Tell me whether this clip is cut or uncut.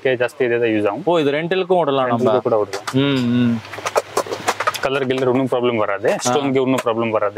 uncut